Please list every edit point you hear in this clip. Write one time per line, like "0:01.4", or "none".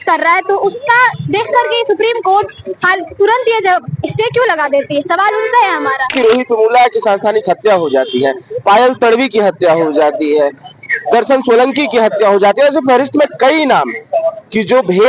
0:06.2